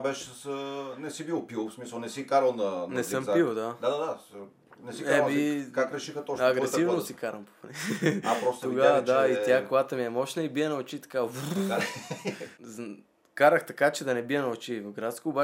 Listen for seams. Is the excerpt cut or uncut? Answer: cut